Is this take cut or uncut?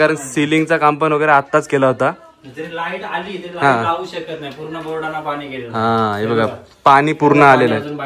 uncut